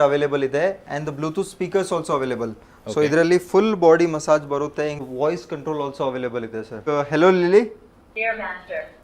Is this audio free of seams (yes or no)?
no